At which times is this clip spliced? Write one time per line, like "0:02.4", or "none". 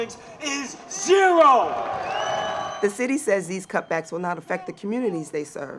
0:02.6